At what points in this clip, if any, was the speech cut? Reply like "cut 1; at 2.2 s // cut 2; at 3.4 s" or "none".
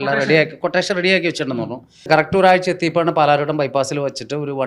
cut 1; at 2.1 s